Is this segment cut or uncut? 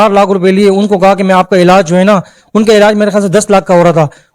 uncut